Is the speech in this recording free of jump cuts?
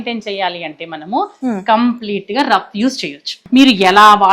no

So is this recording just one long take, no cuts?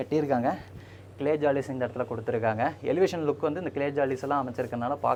yes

